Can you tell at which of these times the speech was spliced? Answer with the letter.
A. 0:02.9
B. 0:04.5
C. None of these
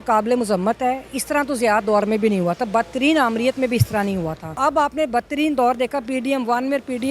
B